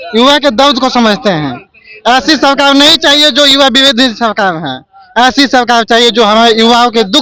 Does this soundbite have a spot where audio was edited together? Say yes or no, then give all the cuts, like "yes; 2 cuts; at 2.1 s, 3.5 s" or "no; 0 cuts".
no; 0 cuts